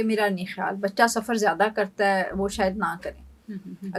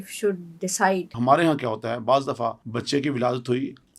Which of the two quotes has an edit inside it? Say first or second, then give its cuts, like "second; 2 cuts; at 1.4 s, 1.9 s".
second; 2 cuts; at 1.1 s, 2.6 s